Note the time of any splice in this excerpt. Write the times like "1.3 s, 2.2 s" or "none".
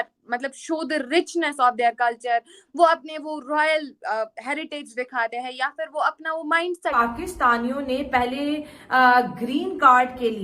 7.0 s